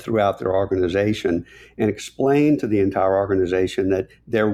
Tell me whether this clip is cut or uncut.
uncut